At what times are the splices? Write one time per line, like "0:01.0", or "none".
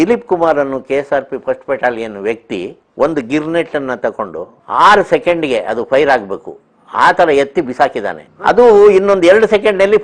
none